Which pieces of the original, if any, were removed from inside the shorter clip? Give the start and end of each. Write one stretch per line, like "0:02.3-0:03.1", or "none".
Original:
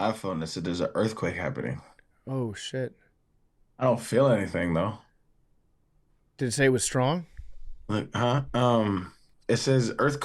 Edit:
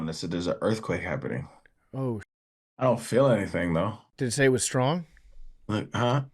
0:02.6-0:03.3
0:05.0-0:06.2